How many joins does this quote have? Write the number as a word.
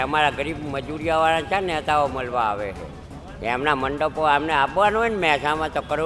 zero